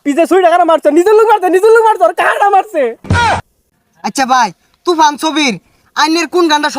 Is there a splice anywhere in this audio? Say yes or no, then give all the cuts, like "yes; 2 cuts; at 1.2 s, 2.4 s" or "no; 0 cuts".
yes; 1 cut; at 3.4 s